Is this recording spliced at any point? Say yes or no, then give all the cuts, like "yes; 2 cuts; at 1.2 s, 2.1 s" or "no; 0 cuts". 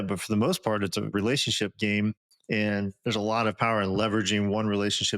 yes; 1 cut; at 1.1 s